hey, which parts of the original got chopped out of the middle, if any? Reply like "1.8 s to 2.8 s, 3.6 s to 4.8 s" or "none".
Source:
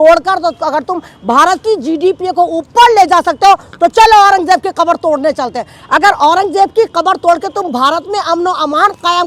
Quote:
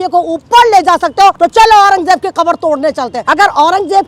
3.6 s to 3.8 s, 5.6 s to 5.8 s

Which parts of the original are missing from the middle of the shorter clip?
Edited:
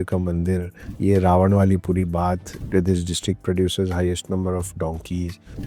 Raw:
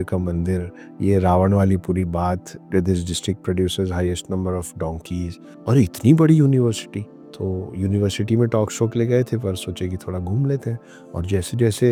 none

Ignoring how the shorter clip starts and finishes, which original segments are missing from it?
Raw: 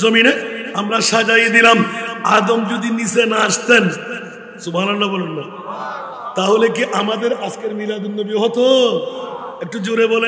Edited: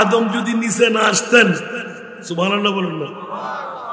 none

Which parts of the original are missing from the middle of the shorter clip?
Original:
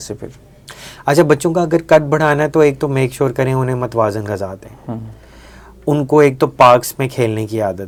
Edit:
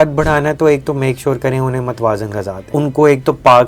4.6 s to 5.8 s

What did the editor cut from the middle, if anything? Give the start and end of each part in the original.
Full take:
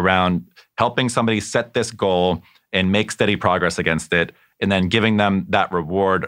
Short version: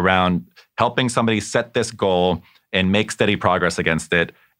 none

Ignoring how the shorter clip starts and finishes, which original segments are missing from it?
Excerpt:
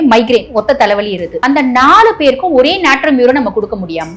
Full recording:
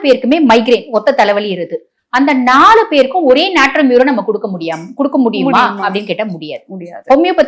1.7 s to 2.0 s

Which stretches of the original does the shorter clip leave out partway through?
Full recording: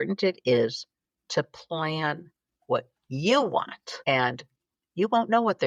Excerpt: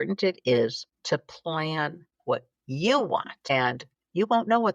0.9 s to 1.1 s, 2.3 s to 2.5 s, 4.0 s to 4.4 s

